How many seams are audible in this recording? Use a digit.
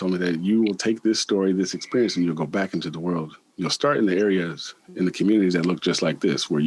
0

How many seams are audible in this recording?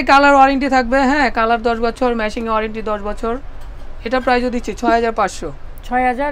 0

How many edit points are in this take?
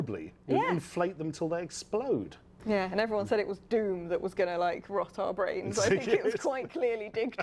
1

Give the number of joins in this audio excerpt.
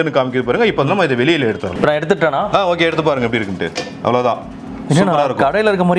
1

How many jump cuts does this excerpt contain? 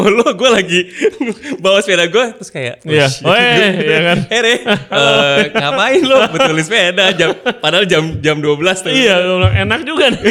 0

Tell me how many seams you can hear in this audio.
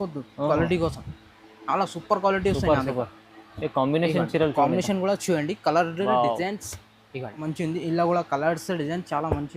1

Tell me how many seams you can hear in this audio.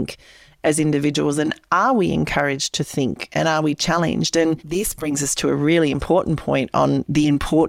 1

